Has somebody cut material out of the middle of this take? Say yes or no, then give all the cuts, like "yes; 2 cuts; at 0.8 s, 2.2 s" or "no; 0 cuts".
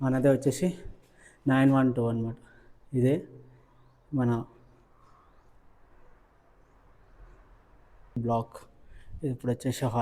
yes; 1 cut; at 8.2 s